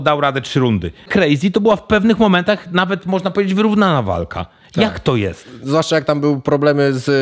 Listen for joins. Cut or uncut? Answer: cut